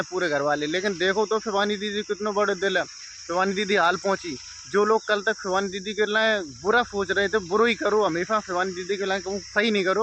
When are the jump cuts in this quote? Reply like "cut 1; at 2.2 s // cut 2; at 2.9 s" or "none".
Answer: none